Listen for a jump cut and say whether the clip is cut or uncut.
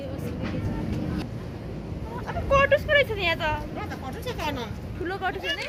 uncut